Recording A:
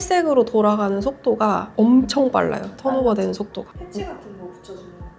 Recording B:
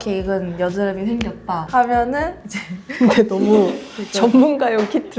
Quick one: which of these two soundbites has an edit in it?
A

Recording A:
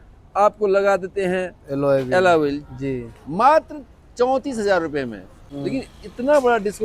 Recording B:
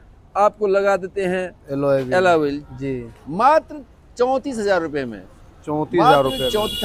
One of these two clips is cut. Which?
A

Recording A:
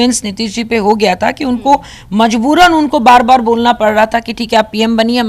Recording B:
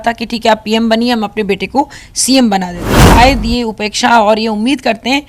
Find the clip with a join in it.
B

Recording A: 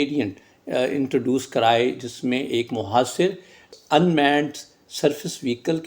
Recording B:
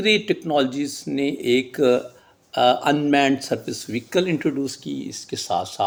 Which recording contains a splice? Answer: A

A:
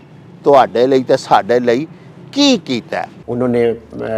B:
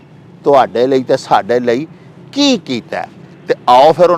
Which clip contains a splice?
A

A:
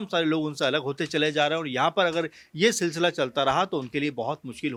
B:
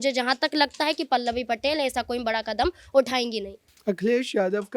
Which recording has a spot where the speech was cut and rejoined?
B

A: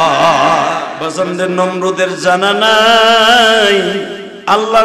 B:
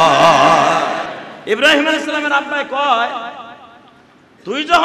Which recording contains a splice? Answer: A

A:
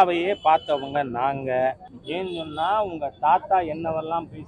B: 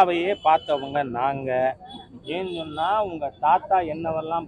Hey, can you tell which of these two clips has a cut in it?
A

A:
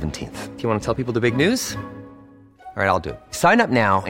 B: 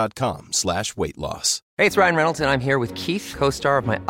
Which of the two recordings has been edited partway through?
B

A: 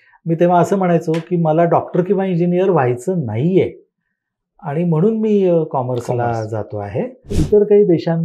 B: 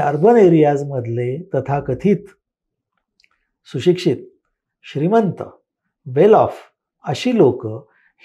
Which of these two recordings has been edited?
A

